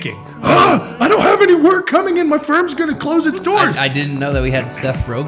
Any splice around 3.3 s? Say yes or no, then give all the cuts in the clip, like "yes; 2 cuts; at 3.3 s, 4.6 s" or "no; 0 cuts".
no; 0 cuts